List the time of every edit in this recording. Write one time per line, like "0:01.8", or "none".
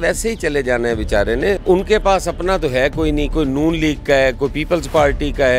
0:01.6